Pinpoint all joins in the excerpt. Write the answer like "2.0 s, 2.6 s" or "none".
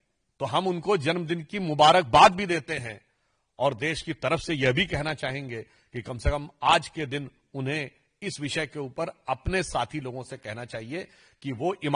none